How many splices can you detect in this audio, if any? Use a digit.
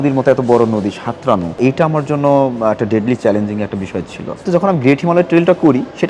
2